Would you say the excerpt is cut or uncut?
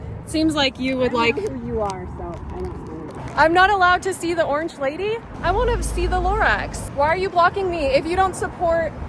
uncut